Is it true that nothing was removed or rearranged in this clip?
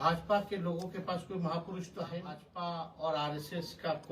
no; 1 cut; at 2.5 s

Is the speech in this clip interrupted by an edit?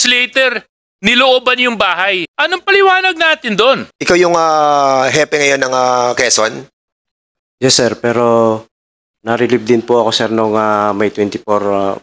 yes; 2 cuts; at 2.3 s, 3.9 s

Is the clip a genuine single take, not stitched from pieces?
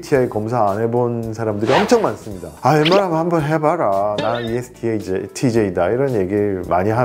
yes; 0 cuts

